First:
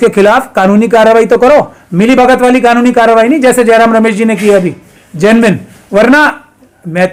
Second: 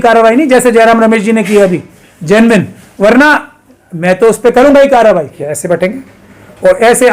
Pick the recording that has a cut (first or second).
second